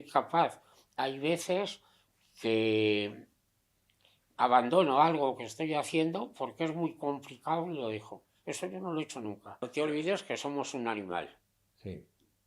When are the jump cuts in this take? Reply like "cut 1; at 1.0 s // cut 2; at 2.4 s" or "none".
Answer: cut 1; at 9.7 s

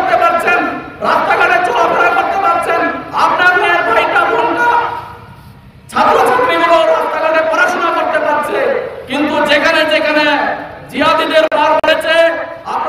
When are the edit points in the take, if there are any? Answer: cut 1; at 11.8 s

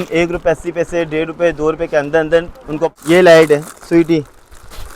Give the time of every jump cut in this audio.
cut 1; at 2.9 s

